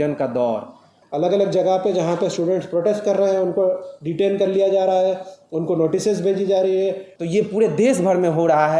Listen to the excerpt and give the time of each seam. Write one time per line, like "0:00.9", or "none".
0:00.9
0:07.1